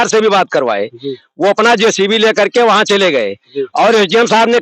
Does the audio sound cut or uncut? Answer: uncut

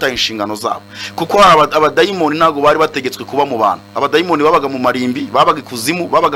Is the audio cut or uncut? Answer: uncut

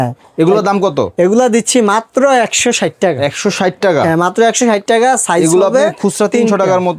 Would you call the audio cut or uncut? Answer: uncut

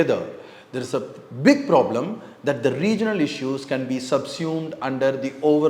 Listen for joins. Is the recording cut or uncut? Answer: uncut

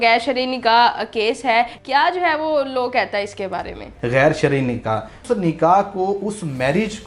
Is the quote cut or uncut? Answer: cut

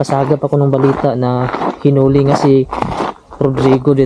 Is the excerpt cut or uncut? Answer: uncut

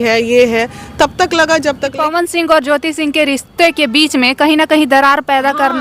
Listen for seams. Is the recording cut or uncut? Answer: cut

